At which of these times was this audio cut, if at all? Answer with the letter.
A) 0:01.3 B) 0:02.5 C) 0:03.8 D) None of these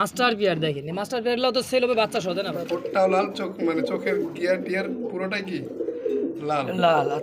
B